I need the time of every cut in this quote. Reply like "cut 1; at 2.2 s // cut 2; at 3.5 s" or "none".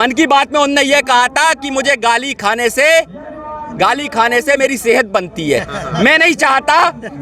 none